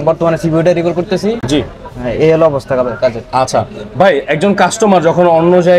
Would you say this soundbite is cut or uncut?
uncut